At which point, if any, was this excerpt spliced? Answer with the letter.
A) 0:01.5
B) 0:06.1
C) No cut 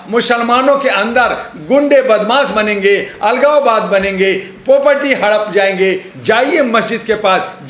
B